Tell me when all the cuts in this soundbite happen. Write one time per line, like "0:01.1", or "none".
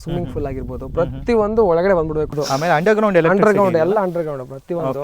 0:02.4